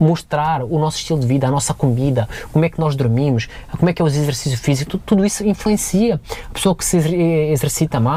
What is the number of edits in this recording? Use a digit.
0